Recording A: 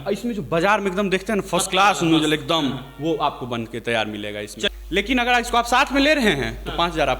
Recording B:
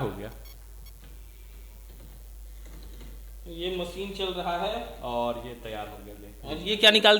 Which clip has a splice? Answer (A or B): A